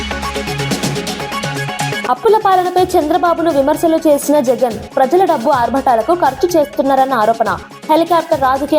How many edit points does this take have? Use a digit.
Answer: 1